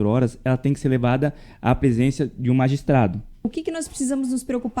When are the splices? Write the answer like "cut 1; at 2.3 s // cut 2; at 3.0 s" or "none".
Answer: cut 1; at 3.5 s

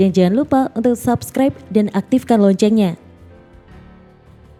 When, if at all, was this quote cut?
none

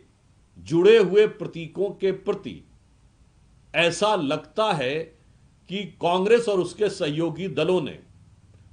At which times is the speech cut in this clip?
none

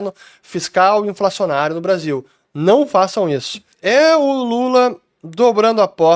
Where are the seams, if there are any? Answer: cut 1; at 3.8 s

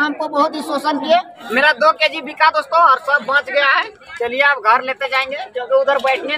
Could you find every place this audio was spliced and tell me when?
cut 1; at 1.4 s

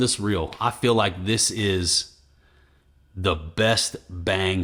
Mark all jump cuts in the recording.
none

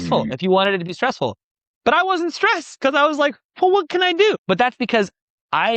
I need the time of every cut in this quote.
cut 1; at 4.4 s

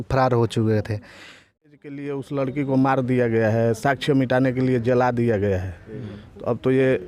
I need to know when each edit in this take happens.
cut 1; at 1.6 s

